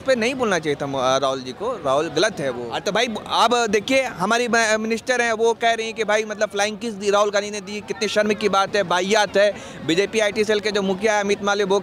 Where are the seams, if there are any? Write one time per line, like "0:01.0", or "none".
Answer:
0:02.7